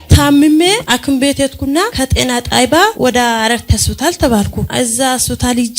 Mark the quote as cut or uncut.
cut